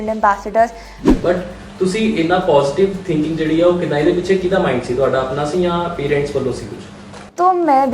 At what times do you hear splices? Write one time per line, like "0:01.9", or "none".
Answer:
0:01.1